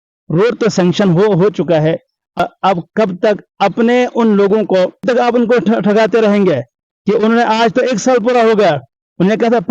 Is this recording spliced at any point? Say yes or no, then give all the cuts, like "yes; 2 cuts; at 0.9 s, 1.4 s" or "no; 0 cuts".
yes; 2 cuts; at 2.4 s, 5.0 s